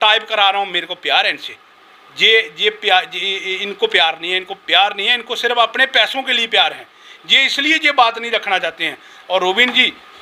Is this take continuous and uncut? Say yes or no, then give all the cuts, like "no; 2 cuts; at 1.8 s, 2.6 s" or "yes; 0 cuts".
yes; 0 cuts